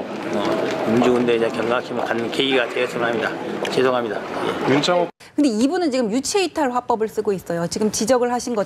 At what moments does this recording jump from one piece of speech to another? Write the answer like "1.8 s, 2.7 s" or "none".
5.2 s